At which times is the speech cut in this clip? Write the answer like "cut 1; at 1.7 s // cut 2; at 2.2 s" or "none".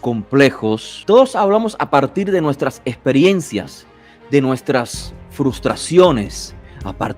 cut 1; at 0.9 s

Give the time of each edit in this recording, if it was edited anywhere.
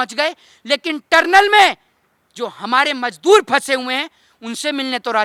none

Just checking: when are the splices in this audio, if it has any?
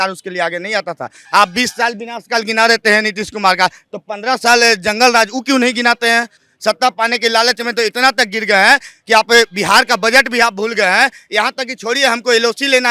cut 1; at 1.2 s // cut 2; at 6.4 s

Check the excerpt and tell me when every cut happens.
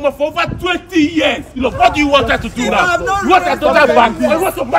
cut 1; at 1.5 s

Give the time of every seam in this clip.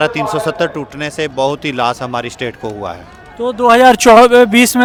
none

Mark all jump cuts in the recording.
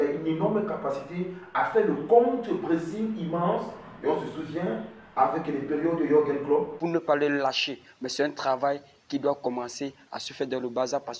cut 1; at 6.7 s

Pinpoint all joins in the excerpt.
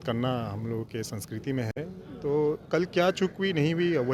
none

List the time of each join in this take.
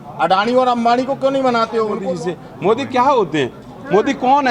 cut 1; at 2.0 s

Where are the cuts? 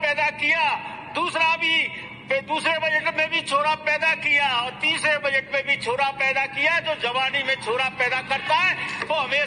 none

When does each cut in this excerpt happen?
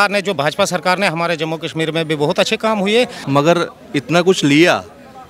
cut 1; at 3.2 s

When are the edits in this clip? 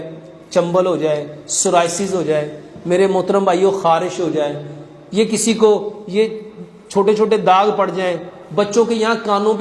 none

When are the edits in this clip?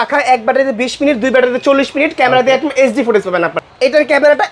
cut 1; at 3.6 s

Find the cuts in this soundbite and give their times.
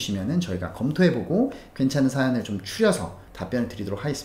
cut 1; at 3.3 s

